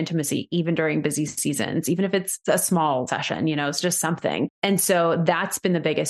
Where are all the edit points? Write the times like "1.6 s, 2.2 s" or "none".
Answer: 2.3 s, 3.1 s, 4.6 s